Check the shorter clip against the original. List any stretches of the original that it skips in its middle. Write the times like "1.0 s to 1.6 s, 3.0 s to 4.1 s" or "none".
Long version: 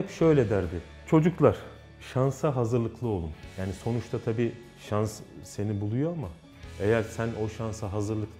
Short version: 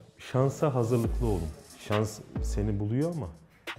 3.5 s to 4.7 s